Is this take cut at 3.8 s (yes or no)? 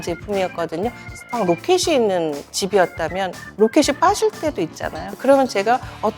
no